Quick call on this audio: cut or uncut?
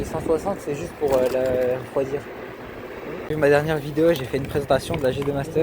cut